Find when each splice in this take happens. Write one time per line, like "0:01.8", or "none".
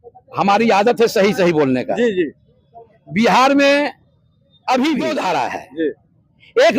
0:05.1